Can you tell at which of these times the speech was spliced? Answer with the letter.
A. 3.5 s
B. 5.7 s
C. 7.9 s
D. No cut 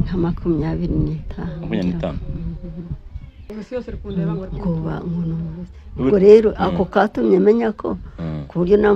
A